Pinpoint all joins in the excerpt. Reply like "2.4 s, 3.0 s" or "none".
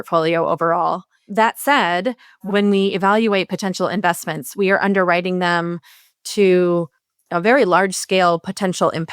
1.1 s, 2.4 s